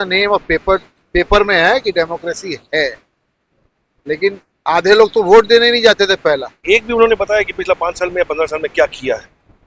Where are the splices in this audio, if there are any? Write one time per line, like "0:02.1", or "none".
0:06.6